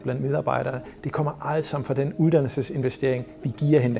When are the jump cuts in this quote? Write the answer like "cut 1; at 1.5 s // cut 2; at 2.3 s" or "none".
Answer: none

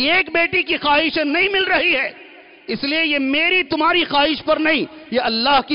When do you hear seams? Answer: none

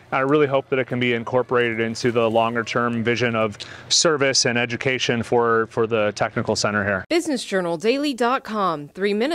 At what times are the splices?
cut 1; at 7.0 s

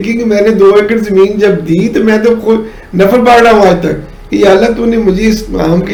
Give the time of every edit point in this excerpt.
none

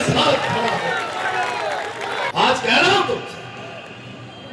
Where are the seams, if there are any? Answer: cut 1; at 2.3 s

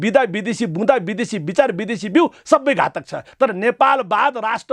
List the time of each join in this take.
cut 1; at 3.3 s

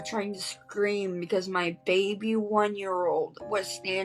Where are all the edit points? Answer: none

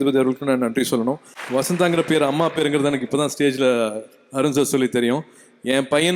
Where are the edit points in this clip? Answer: cut 1; at 1.3 s

